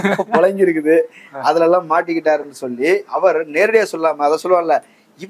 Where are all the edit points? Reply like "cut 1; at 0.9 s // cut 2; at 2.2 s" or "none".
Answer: none